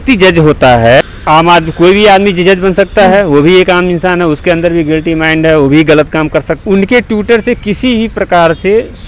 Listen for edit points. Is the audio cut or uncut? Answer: cut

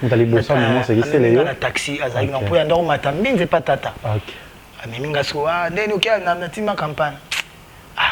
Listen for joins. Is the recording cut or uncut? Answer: uncut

